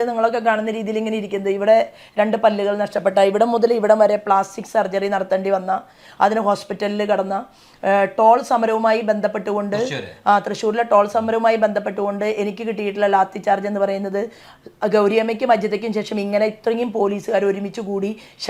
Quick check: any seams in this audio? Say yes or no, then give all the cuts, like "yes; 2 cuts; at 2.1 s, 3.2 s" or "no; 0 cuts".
no; 0 cuts